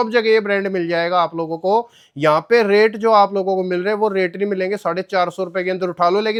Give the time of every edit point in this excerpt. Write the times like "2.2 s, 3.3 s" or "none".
none

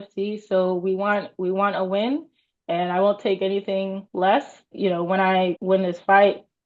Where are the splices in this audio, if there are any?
4.0 s, 4.7 s, 5.6 s

